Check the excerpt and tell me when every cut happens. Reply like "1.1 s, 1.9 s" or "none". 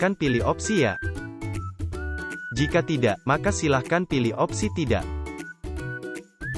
1.0 s, 2.5 s, 5.0 s